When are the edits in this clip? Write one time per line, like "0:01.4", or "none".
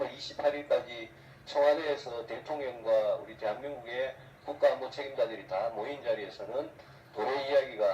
0:01.4